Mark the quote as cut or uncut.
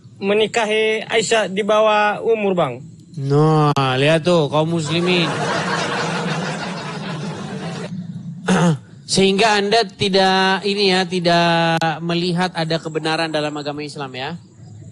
uncut